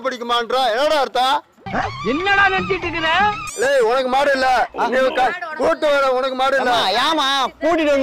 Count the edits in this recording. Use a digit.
1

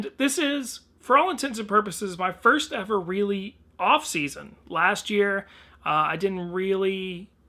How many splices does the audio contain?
0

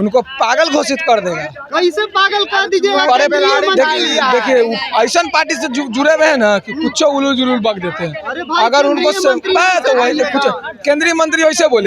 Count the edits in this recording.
0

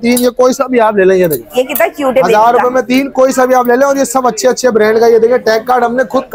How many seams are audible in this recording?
0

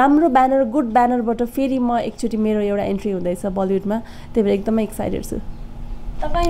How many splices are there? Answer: 0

